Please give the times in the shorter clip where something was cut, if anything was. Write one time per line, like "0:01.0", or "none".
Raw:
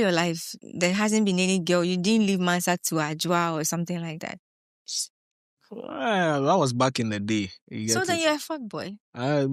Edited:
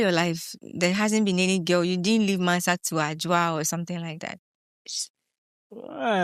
none